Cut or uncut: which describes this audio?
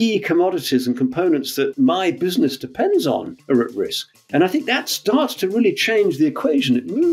cut